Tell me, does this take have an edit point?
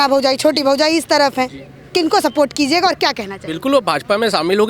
no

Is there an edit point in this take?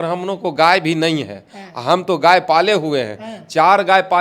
no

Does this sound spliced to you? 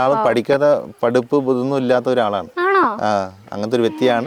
no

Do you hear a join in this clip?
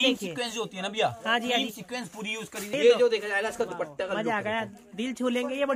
yes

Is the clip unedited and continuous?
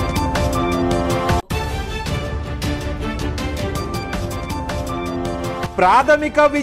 yes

